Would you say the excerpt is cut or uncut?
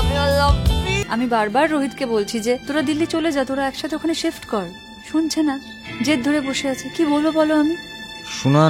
cut